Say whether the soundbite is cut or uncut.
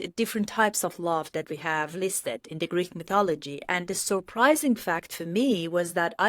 uncut